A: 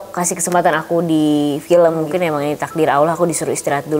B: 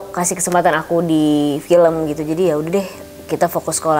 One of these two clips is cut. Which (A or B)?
A